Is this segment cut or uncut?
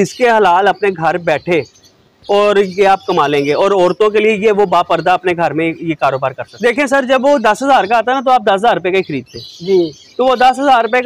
cut